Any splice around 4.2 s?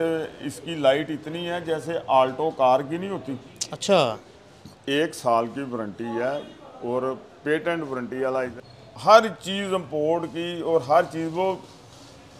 yes; 2 cuts; at 4.2 s, 8.6 s

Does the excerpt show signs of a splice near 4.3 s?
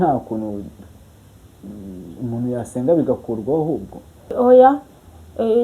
yes; 1 cut; at 4.3 s

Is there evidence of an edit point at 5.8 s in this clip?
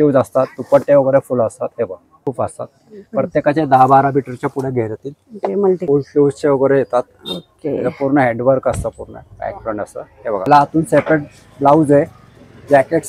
yes; 3 cuts; at 2.2 s, 5.8 s, 10.5 s

